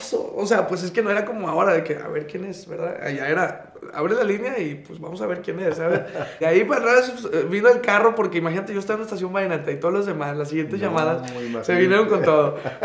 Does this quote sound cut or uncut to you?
cut